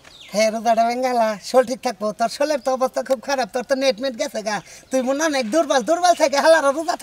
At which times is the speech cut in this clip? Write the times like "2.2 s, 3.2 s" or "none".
none